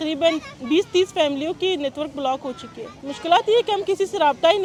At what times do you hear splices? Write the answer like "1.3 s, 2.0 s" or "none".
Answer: none